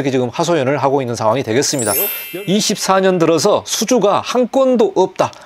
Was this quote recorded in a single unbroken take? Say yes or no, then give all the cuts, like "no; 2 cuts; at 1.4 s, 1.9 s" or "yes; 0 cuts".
no; 1 cut; at 2.2 s